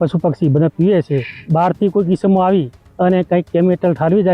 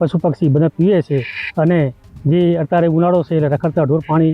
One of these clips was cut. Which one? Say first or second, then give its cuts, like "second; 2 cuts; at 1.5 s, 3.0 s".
first; 1 cut; at 1.3 s